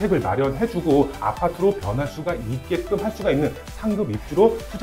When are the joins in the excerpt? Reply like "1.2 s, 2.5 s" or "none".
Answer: none